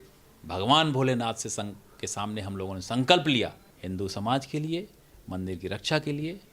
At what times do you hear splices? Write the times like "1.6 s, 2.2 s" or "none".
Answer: 3.7 s